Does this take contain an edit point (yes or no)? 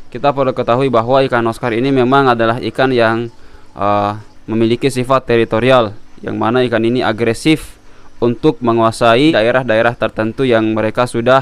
yes